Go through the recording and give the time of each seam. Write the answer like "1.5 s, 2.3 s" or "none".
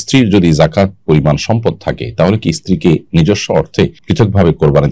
4.0 s